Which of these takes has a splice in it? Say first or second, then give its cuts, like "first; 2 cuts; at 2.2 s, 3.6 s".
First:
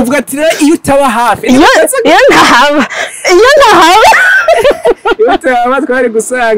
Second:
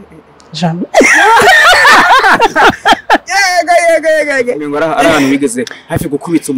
second; 1 cut; at 4.6 s